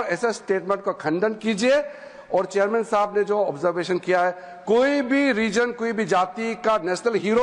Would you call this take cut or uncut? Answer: uncut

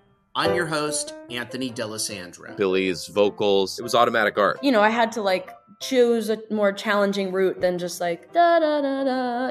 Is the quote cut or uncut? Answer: uncut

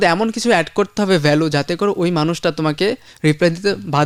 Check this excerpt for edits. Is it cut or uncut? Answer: uncut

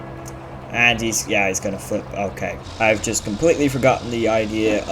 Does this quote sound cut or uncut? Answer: cut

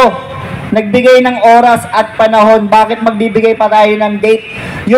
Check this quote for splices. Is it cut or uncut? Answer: uncut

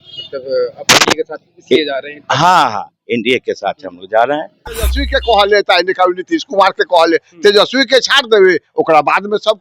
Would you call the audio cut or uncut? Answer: cut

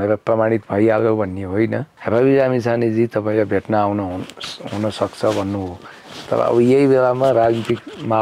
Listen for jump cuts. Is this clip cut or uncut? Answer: cut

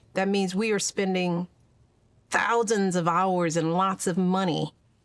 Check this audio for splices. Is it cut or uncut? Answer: uncut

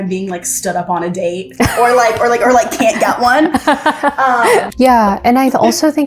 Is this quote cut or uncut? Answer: cut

